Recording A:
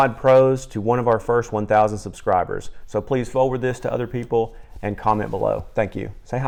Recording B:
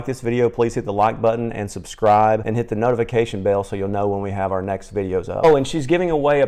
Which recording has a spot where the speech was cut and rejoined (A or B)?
B